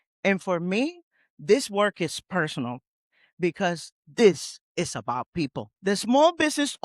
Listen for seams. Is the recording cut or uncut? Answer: cut